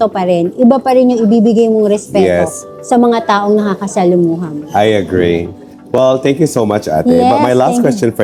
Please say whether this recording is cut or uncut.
uncut